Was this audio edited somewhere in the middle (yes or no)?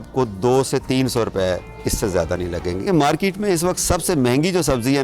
yes